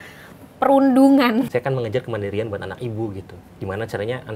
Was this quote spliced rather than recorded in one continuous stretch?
yes; 1 cut; at 1.5 s

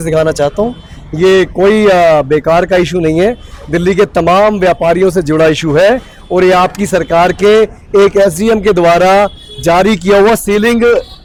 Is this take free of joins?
yes; 0 cuts

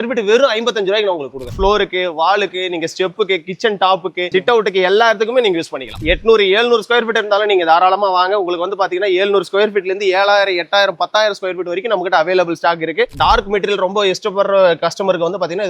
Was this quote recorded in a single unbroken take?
no; 4 cuts; at 1.5 s, 4.3 s, 6.0 s, 13.1 s

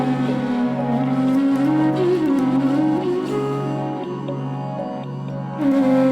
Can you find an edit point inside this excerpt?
no; 0 cuts

